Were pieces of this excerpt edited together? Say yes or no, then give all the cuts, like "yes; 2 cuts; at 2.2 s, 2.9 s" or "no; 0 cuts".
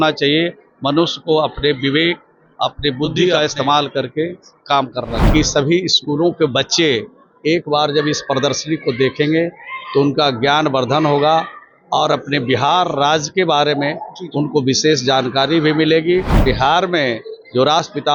yes; 3 cuts; at 3.3 s, 5.2 s, 16.4 s